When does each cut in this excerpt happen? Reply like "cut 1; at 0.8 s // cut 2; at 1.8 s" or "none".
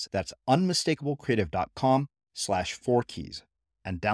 none